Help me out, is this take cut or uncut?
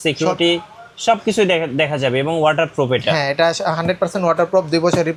uncut